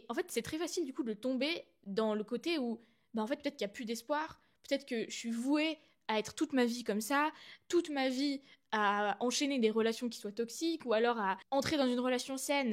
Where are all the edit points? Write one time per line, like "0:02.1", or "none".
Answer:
none